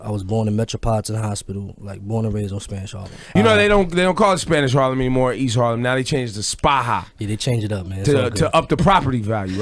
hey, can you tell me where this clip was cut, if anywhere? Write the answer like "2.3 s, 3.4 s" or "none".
2.4 s